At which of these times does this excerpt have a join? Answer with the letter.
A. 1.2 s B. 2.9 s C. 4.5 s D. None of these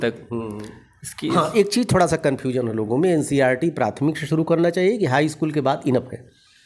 D